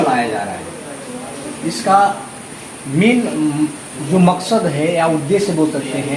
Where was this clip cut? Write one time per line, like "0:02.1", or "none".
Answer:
none